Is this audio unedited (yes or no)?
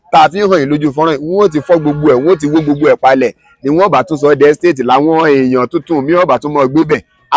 yes